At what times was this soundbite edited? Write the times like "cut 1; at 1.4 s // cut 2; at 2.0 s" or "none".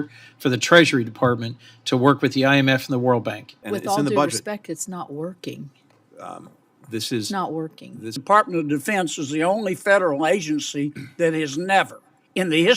cut 1; at 3.5 s // cut 2; at 8.2 s